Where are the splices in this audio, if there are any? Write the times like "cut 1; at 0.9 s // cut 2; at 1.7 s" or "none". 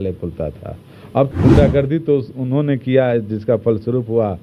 cut 1; at 1.3 s